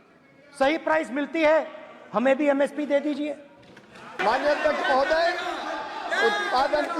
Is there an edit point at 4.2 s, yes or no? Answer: yes